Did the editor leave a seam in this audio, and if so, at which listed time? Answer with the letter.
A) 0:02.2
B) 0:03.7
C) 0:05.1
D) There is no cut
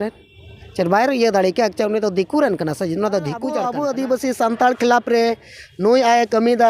B